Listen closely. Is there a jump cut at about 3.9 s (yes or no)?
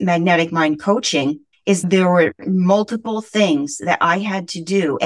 no